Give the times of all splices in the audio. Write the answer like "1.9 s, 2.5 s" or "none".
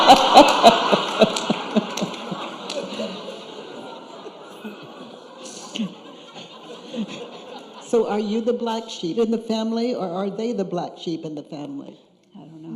6.6 s